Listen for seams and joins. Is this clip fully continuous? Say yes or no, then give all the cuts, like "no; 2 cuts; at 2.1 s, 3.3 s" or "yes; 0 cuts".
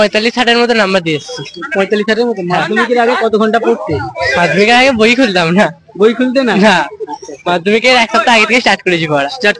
yes; 0 cuts